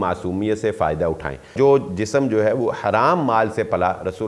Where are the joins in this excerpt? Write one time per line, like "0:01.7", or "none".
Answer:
0:01.5